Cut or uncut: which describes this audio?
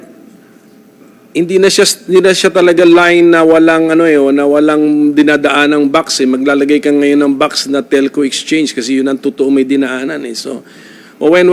uncut